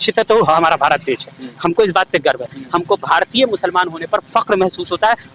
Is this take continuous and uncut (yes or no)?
yes